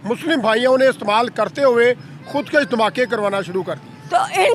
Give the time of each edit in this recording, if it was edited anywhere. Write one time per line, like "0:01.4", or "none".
none